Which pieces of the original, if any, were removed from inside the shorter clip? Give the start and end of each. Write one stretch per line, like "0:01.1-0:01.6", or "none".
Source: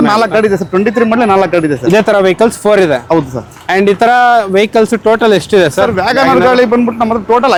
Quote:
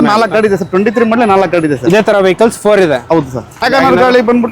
0:03.6-0:06.0